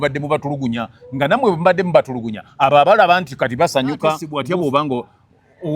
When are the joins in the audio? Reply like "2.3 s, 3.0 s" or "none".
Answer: 4.3 s